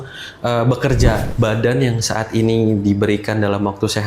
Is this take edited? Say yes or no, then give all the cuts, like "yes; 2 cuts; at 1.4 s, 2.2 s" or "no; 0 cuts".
yes; 1 cut; at 1.2 s